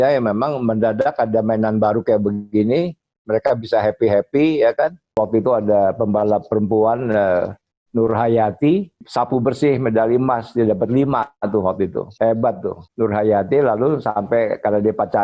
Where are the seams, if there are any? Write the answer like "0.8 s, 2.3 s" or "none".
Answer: 5.2 s, 9.0 s, 12.0 s, 12.8 s